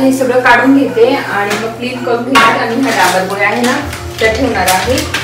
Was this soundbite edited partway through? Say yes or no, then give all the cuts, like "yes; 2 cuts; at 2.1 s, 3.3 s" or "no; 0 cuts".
no; 0 cuts